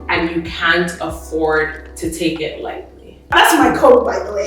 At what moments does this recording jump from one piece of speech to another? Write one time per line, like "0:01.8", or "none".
0:03.3